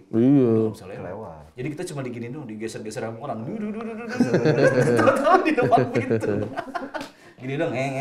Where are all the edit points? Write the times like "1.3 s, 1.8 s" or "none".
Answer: none

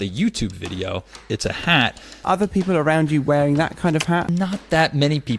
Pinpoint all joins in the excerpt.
1.2 s, 2.2 s, 4.3 s

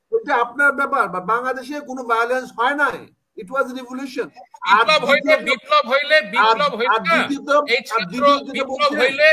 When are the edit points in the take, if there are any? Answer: 4.4 s

